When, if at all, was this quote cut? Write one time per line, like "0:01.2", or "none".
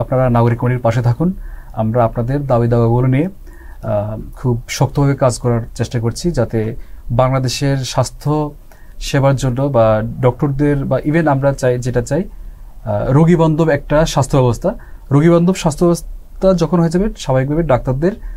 none